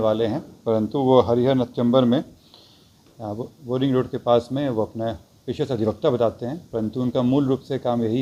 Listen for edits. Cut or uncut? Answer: uncut